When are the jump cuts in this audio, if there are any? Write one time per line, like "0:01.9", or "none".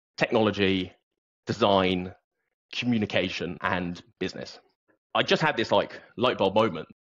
0:03.6
0:05.0